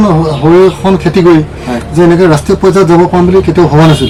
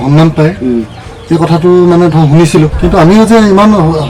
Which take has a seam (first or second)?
second